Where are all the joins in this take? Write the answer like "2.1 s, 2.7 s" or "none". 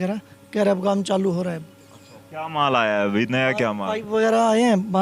none